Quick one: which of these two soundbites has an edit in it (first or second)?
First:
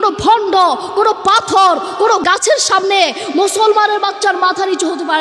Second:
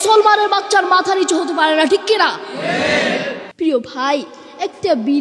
second